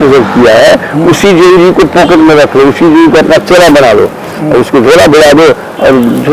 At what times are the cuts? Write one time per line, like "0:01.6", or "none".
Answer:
none